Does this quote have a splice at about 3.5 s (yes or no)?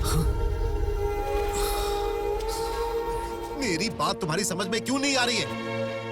yes